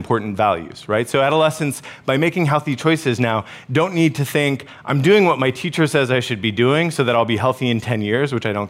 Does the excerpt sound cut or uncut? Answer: uncut